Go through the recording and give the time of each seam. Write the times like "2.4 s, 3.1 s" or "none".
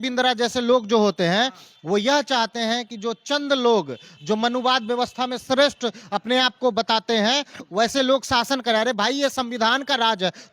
none